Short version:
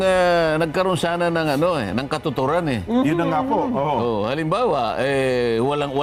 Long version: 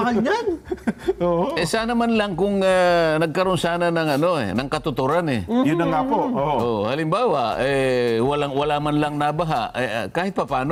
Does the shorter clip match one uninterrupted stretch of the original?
yes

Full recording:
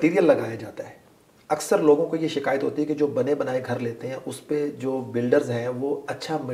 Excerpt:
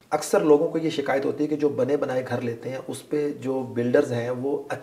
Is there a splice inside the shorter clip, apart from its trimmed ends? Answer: no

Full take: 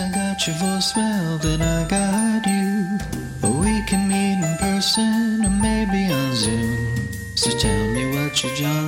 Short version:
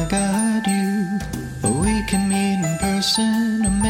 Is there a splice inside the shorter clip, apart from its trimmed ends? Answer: no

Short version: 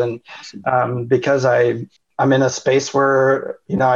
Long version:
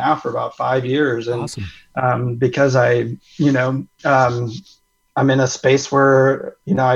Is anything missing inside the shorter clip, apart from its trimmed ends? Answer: yes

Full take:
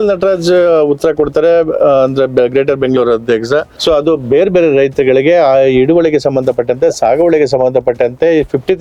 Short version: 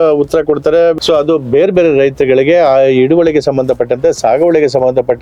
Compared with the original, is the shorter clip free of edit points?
no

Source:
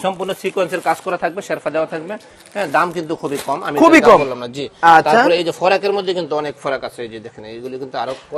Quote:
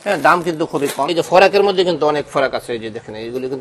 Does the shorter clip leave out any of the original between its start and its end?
yes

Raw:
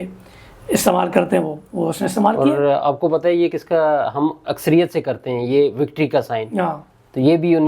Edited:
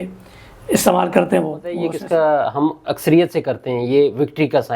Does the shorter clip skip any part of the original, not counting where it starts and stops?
yes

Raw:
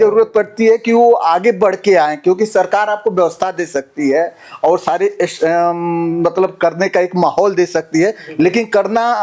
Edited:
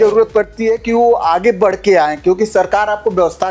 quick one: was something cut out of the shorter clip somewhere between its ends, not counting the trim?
no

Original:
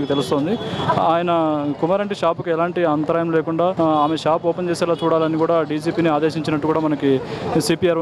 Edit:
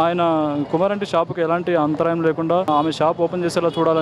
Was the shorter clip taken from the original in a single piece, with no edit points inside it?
no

